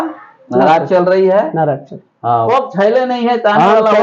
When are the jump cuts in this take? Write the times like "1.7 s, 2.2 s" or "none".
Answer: 2.5 s